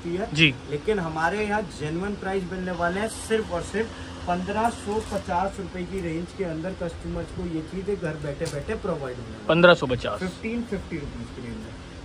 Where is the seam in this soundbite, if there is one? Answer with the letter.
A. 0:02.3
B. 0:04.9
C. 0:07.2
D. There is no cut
D